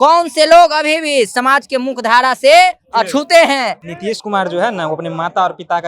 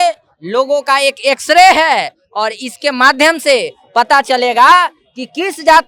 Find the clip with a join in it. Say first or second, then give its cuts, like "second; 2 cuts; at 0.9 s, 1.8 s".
first; 1 cut; at 3.9 s